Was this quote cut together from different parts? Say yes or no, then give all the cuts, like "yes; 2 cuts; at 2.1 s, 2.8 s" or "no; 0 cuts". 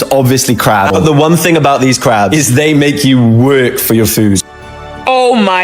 yes; 2 cuts; at 0.9 s, 4.9 s